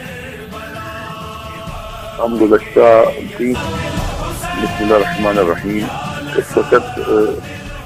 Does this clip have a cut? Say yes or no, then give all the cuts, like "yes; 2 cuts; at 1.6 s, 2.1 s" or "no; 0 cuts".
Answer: no; 0 cuts